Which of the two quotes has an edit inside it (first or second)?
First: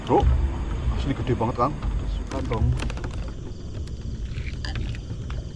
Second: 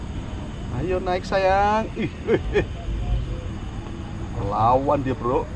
first